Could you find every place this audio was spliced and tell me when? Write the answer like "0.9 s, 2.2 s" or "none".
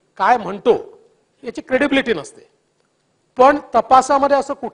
none